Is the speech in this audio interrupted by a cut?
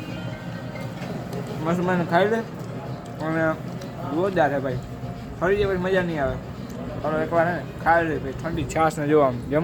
no; 0 cuts

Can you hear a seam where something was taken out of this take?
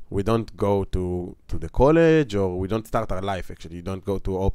no; 0 cuts

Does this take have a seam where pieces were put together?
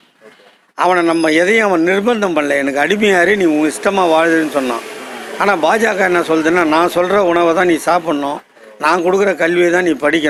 no; 0 cuts

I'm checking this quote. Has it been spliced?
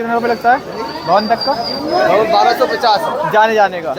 no; 0 cuts

